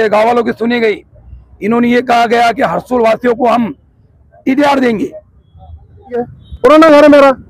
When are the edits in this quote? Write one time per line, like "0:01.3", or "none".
0:06.4